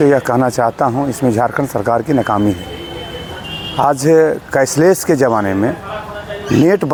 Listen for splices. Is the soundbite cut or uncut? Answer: uncut